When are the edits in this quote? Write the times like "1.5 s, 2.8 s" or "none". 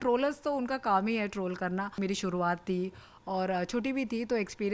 2.0 s

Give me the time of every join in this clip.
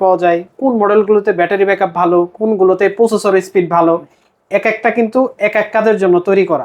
none

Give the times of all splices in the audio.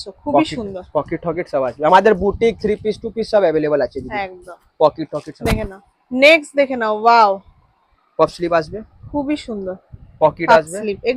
none

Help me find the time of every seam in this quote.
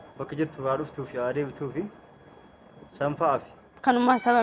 none

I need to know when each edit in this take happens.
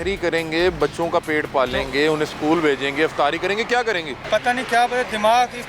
4.2 s

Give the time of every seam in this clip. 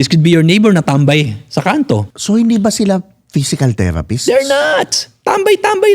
2.1 s

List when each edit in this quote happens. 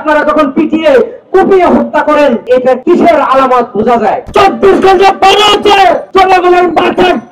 2.6 s, 4.2 s, 6.0 s

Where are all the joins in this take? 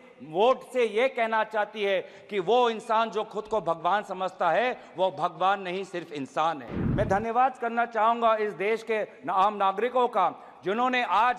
6.8 s

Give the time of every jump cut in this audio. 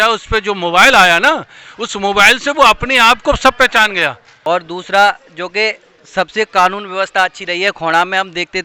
4.3 s

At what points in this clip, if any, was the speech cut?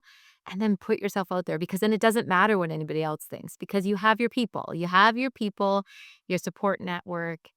none

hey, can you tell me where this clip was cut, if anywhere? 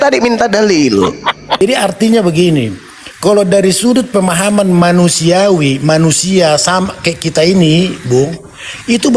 1.6 s

